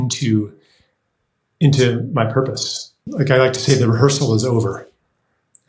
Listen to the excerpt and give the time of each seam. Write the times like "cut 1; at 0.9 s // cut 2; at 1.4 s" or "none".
cut 1; at 3.0 s